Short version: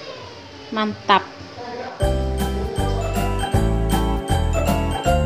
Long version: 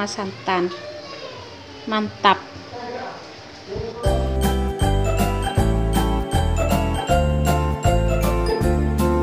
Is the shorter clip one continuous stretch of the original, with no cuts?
no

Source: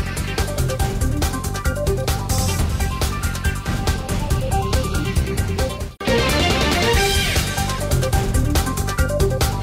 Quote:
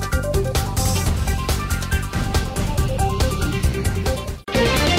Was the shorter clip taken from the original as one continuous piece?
yes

